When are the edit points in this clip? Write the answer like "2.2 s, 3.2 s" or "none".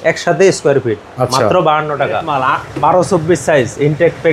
2.3 s